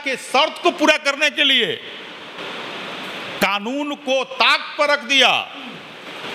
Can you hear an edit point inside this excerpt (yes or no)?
no